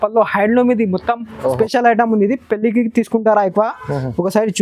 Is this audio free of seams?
no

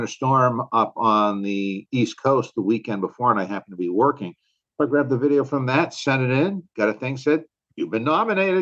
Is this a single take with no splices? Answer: yes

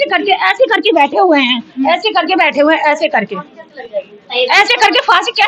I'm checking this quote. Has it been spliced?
no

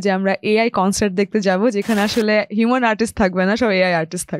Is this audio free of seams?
yes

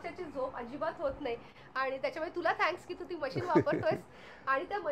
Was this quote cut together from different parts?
no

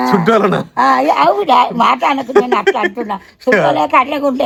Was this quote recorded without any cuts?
yes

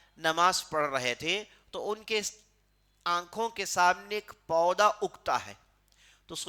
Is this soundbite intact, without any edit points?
yes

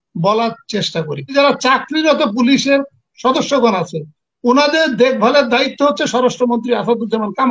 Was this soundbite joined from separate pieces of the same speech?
yes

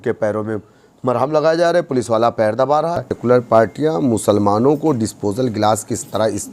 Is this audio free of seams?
no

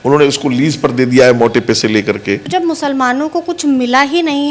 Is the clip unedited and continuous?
no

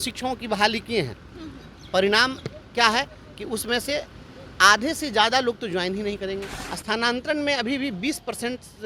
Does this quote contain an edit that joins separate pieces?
yes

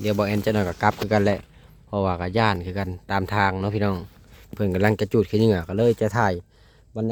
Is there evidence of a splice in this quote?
no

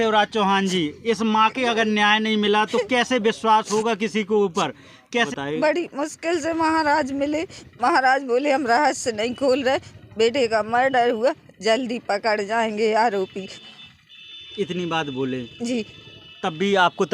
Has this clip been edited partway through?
yes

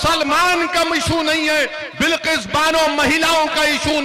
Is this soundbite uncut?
yes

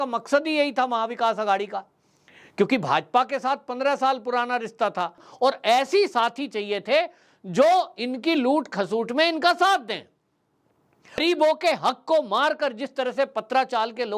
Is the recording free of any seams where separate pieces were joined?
no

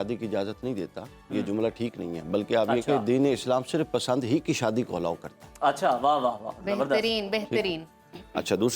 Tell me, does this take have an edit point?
no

